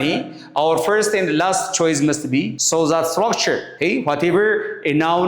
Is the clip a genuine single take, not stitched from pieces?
no; 2 cuts; at 2.6 s, 3.7 s

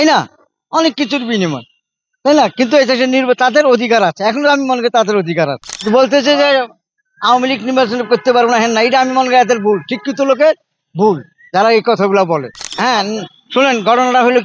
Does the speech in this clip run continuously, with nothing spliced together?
no; 2 cuts; at 5.8 s, 12.6 s

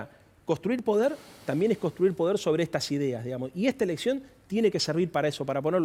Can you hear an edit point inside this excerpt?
no; 0 cuts

